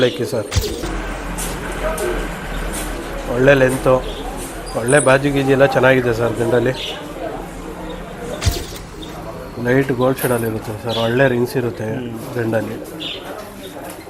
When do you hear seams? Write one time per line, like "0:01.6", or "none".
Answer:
0:00.9
0:08.6